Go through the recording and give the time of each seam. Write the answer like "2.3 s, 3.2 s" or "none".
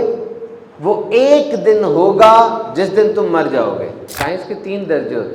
4.0 s